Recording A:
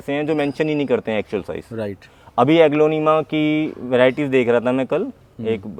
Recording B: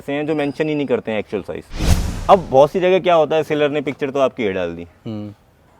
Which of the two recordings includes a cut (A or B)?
B